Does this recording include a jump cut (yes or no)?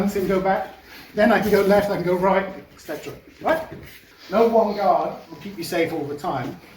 yes